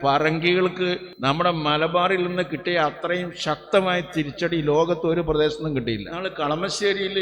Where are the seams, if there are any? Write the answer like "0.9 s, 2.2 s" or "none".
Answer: 1.1 s, 6.1 s